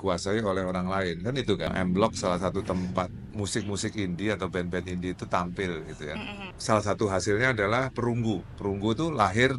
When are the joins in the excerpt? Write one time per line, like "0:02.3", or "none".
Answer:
0:01.7
0:03.3
0:06.4